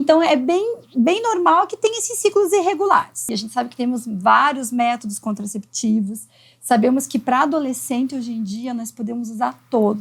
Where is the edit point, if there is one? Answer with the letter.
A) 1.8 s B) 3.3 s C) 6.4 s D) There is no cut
B